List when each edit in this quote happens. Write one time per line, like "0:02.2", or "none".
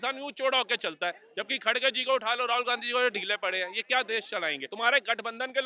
0:04.6